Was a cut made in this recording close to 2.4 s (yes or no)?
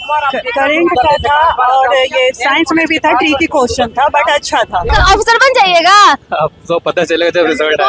no